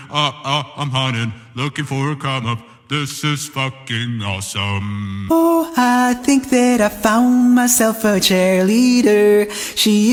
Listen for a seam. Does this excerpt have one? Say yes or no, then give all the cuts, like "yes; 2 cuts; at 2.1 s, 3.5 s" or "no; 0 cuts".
no; 0 cuts